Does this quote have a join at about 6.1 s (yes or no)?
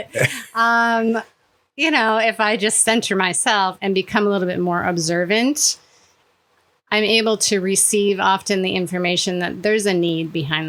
no